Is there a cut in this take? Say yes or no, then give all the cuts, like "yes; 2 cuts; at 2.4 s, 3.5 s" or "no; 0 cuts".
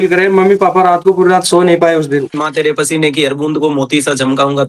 yes; 1 cut; at 2.3 s